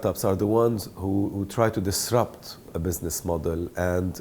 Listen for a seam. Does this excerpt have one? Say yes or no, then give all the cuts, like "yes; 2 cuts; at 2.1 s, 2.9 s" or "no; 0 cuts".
yes; 1 cut; at 2.7 s